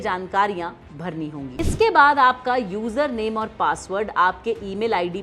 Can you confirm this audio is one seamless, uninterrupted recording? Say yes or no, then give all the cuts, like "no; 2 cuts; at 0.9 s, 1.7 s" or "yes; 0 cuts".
no; 1 cut; at 1.5 s